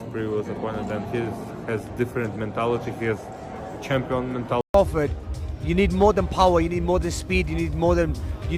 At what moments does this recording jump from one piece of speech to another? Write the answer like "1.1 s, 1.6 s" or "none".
4.7 s